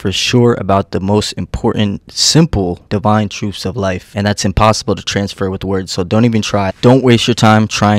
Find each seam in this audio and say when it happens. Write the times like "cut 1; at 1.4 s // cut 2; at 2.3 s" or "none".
cut 1; at 6.7 s